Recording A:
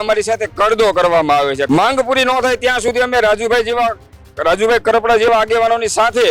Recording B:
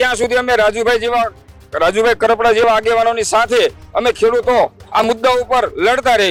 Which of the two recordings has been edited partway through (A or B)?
A